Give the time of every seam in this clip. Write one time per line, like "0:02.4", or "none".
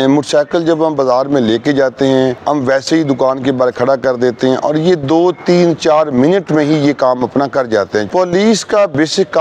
0:02.4
0:08.1